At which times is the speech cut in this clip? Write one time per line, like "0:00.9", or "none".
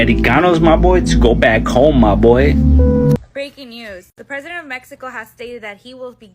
0:03.2